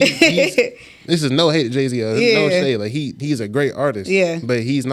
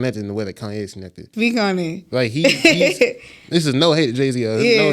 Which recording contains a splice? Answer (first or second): second